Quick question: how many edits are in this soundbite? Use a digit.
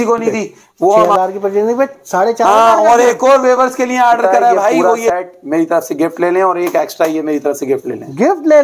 2